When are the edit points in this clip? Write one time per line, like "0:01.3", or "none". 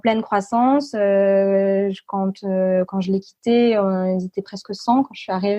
none